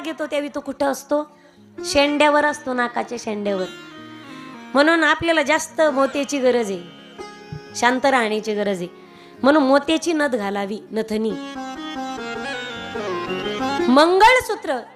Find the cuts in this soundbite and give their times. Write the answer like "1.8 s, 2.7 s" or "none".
none